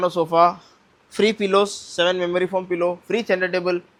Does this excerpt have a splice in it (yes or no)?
no